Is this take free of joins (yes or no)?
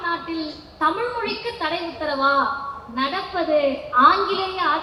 yes